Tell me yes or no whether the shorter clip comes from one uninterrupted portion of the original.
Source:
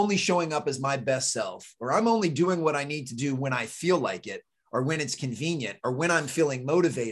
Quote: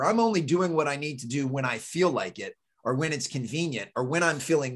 yes